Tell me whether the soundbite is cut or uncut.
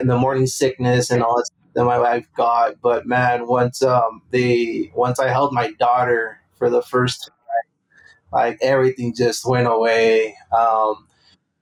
uncut